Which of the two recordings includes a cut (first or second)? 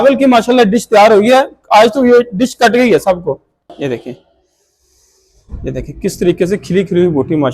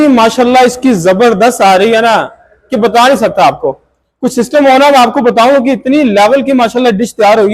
first